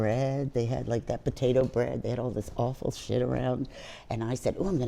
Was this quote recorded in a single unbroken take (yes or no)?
yes